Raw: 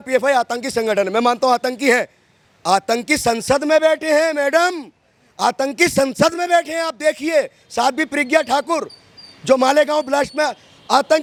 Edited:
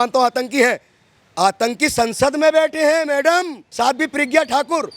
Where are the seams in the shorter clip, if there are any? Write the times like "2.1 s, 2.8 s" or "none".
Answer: 3.6 s